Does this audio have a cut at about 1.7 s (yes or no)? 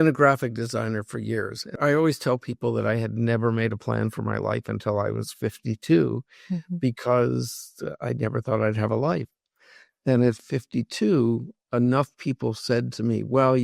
yes